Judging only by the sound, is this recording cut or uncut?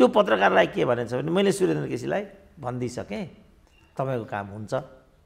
uncut